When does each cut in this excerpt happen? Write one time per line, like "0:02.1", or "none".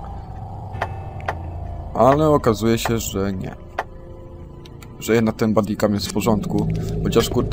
none